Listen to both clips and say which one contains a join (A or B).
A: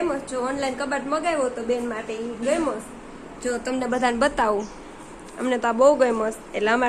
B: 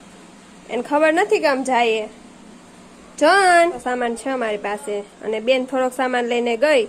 B